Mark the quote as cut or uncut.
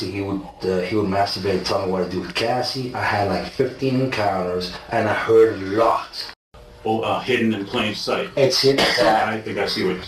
cut